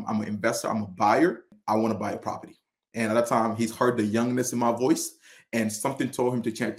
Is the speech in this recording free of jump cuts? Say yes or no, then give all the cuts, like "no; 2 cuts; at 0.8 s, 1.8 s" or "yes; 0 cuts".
no; 1 cut; at 1.5 s